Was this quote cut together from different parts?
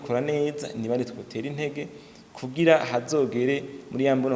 no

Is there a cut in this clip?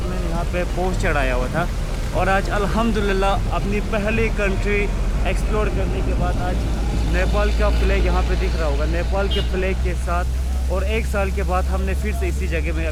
no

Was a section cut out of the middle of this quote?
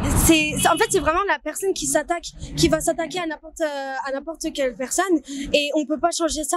no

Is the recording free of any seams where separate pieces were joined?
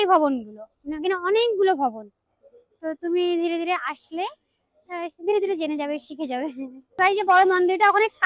yes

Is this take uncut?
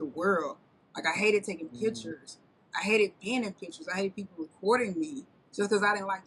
yes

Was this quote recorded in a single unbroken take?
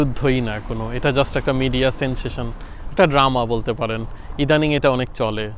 yes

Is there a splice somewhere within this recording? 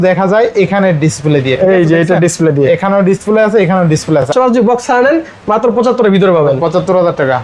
yes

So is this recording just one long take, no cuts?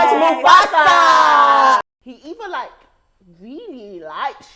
no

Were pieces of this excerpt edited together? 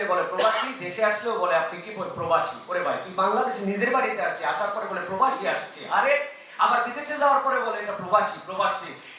no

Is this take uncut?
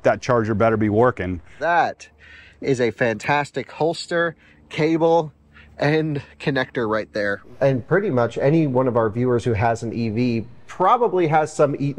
no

